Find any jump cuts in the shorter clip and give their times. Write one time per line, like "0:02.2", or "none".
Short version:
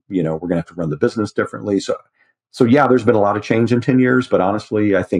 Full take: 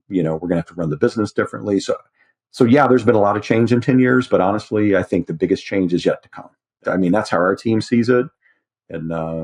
none